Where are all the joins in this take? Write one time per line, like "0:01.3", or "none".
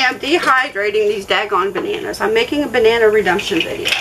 none